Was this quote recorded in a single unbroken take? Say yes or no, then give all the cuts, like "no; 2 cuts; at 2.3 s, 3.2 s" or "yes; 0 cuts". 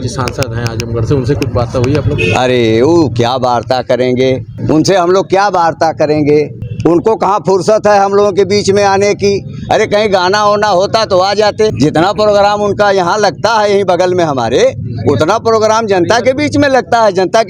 no; 3 cuts; at 4.5 s, 6.6 s, 11.7 s